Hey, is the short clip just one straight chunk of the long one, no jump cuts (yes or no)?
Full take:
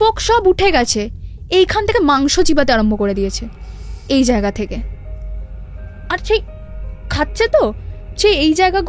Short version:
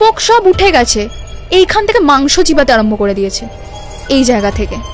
yes